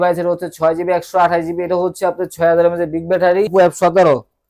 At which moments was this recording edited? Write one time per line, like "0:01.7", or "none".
0:03.5